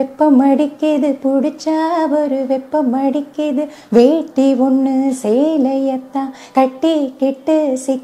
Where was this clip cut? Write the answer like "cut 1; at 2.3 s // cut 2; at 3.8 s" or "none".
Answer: none